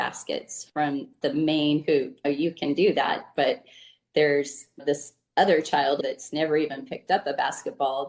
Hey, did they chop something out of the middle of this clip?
yes; 2 cuts; at 1.2 s, 6.0 s

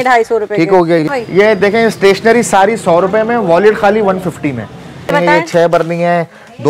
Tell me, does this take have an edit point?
yes; 2 cuts; at 1.1 s, 5.1 s

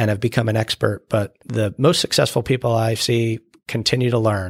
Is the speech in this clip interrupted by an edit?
yes; 1 cut; at 1.4 s

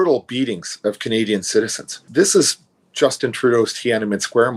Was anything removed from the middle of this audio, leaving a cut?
no; 0 cuts

